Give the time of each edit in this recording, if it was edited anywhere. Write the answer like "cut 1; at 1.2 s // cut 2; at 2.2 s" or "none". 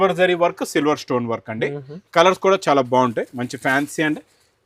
none